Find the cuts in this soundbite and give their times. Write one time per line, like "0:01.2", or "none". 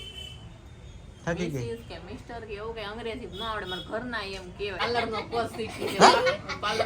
0:04.8